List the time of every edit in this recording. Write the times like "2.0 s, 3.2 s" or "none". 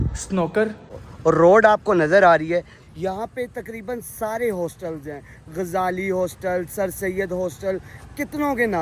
1.0 s